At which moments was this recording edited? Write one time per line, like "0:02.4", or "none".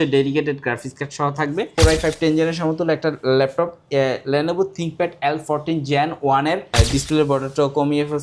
0:01.7
0:06.7